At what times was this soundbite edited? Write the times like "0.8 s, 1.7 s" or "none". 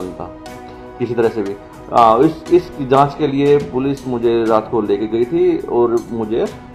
none